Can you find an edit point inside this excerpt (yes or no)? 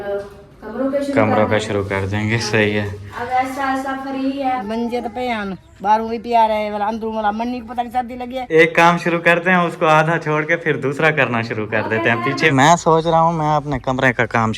yes